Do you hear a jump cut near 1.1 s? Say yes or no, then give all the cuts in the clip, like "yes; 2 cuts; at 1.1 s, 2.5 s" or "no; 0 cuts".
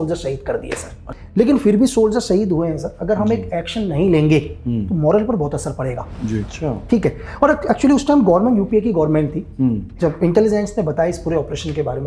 yes; 2 cuts; at 1.1 s, 6.5 s